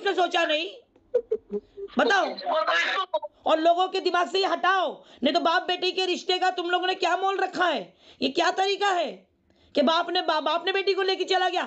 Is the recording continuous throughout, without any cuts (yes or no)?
no